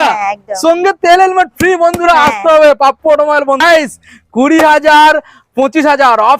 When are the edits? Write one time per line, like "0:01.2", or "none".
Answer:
0:03.6